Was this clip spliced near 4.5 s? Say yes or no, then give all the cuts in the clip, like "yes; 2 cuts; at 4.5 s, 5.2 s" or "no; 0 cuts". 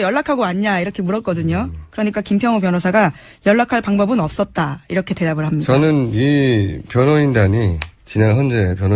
yes; 1 cut; at 4.5 s